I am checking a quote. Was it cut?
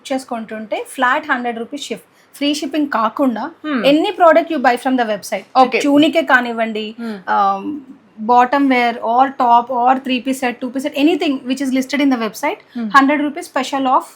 no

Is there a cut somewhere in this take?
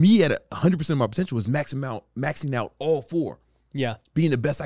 no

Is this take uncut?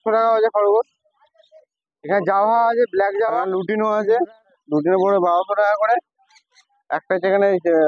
no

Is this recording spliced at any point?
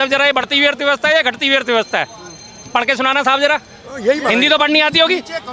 no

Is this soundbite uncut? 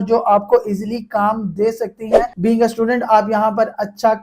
no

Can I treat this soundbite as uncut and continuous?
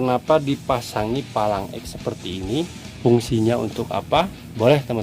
no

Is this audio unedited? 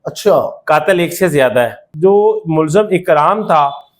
no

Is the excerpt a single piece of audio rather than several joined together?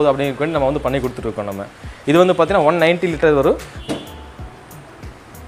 yes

